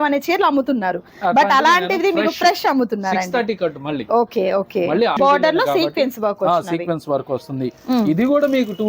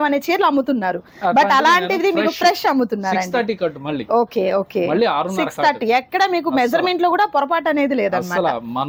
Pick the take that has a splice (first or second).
first